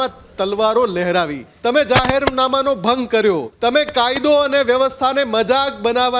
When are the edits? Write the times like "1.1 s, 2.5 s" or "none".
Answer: 1.4 s, 3.5 s